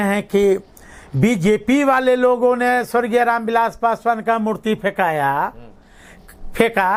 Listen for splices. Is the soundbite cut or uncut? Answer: uncut